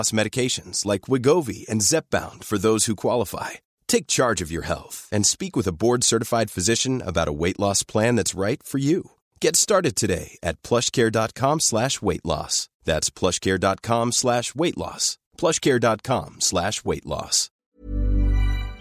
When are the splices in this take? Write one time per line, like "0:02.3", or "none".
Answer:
0:17.5